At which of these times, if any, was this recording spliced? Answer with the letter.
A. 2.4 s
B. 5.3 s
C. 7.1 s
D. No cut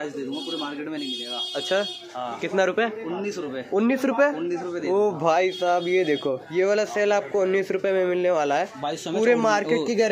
D